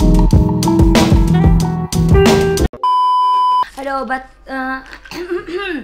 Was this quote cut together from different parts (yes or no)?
yes